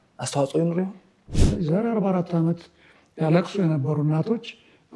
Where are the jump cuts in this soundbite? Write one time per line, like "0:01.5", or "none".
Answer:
0:01.4